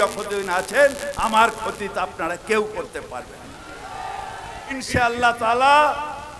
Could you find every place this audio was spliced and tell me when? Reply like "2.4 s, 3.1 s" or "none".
4.7 s